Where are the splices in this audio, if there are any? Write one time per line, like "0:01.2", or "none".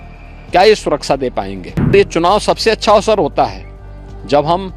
0:01.9

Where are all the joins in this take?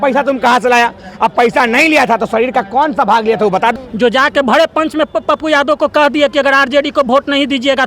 0:03.7

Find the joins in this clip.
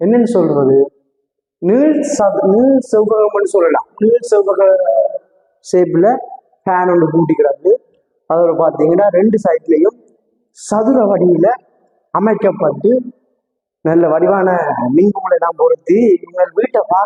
none

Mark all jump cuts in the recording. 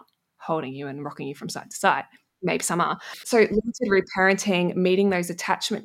0:03.2

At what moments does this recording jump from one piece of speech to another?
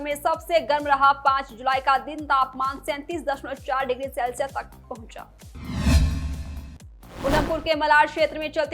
0:05.4
0:07.3

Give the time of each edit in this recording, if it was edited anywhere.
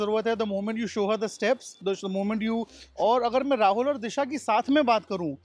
0:02.8

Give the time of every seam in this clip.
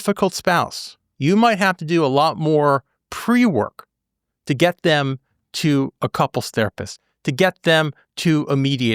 0:01.1

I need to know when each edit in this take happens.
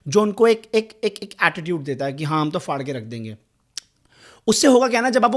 none

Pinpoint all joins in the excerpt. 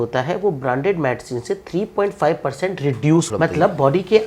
0:03.3

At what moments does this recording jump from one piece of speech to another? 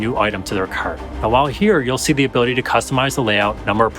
0:01.1

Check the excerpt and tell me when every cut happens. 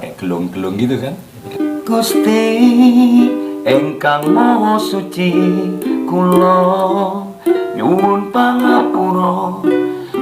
0:01.4

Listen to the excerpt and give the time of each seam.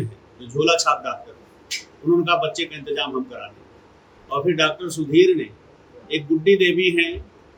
none

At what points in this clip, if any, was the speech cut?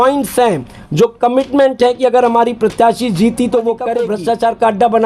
0:04.0

